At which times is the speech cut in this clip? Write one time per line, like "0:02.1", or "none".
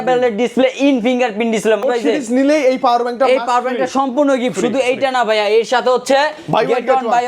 0:01.8